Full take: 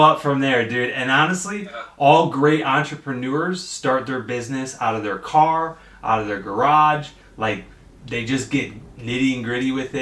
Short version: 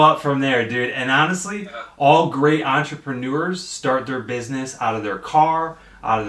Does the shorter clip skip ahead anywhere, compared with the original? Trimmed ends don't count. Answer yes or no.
no